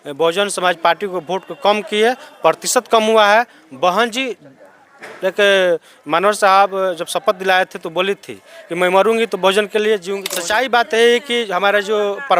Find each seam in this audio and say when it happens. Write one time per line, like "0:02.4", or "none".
0:10.2